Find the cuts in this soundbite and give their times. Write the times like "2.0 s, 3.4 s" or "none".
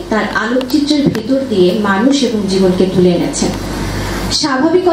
none